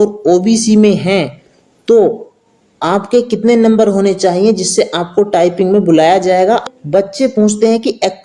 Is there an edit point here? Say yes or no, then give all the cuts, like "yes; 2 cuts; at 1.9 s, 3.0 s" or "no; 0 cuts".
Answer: yes; 1 cut; at 6.7 s